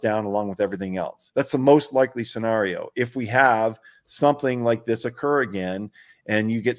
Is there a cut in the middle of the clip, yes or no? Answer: yes